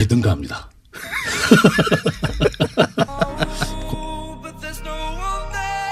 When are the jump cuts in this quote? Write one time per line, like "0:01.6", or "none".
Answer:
0:03.3

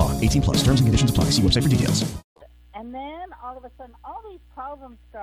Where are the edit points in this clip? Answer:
none

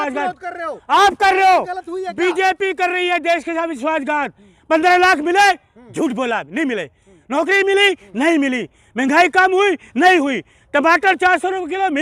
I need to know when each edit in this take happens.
none

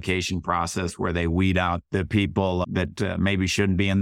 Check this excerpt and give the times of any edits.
0:01.8

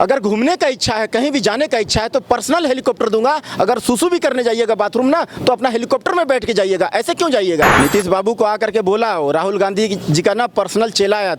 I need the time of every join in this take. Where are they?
0:07.7

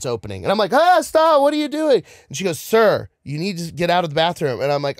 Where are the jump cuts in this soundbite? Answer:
none

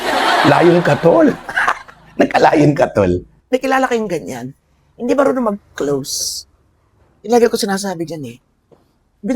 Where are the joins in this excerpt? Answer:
0:03.4

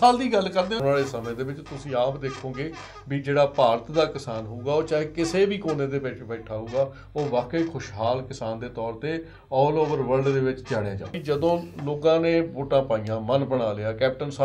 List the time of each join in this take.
0:00.8
0:11.2

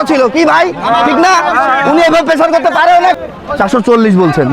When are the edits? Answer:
0:03.2

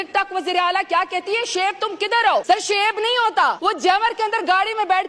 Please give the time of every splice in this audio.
0:02.4
0:03.6

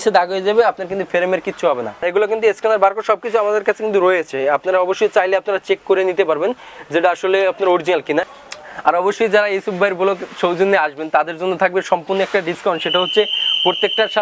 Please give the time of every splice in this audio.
0:02.0
0:08.2

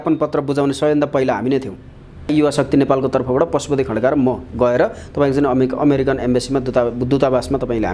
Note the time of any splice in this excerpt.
0:02.3

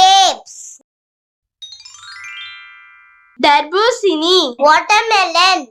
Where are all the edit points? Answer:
none

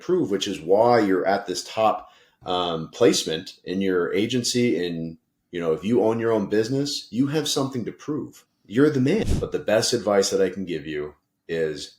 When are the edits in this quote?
0:09.4

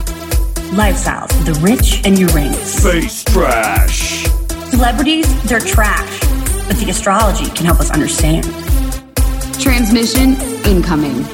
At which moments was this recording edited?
none

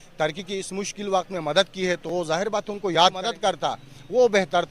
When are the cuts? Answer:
0:03.2

